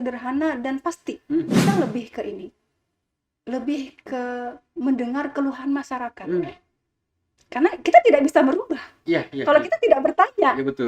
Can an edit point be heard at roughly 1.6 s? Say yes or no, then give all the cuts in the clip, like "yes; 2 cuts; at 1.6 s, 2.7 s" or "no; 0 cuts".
yes; 1 cut; at 1.6 s